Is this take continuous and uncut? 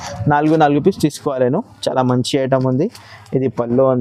yes; 0 cuts

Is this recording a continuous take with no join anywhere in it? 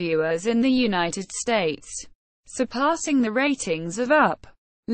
yes; 0 cuts

